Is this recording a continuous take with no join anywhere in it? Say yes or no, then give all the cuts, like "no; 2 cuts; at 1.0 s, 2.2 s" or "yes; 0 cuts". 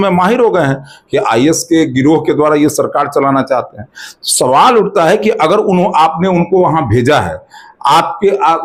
yes; 0 cuts